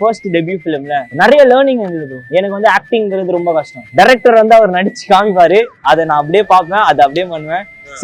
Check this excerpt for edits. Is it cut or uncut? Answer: cut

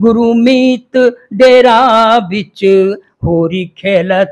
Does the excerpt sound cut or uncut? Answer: uncut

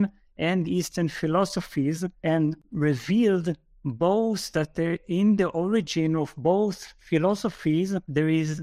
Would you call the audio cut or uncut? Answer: uncut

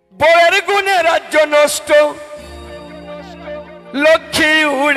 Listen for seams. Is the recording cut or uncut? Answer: uncut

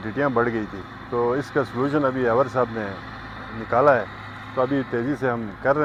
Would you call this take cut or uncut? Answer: uncut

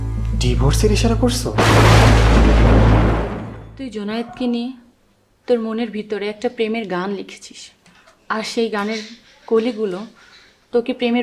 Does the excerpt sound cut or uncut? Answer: cut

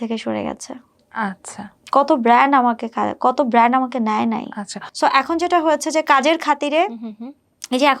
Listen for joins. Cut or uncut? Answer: uncut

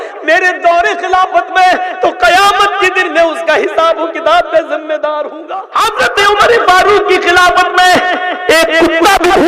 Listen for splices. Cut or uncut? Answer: cut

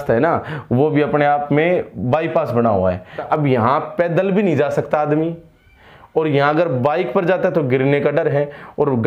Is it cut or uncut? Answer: cut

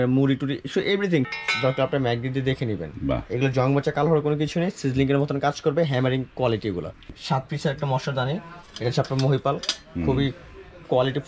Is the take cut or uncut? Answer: cut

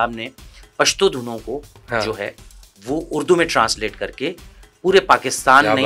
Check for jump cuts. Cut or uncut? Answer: uncut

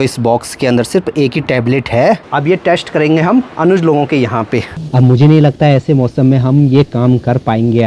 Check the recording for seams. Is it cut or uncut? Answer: cut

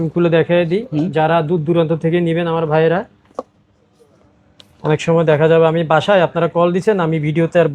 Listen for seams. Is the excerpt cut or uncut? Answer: uncut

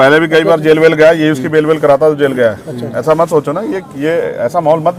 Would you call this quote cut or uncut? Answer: uncut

